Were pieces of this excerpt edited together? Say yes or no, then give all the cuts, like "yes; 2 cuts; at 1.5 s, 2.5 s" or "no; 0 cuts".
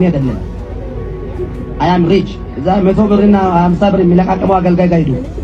yes; 1 cut; at 2.4 s